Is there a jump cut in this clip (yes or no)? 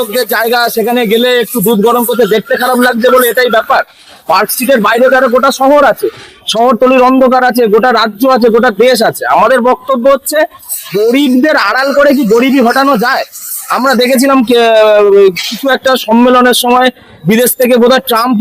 no